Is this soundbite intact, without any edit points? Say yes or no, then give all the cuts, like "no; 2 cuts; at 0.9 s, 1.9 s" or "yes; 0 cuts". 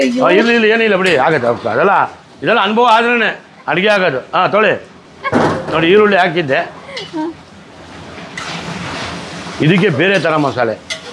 yes; 0 cuts